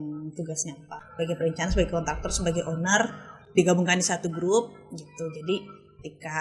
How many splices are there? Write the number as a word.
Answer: one